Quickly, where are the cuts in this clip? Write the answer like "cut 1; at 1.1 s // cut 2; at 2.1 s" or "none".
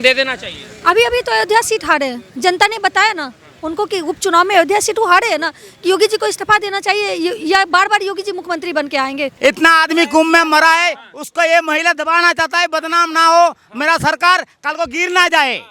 cut 1; at 9.3 s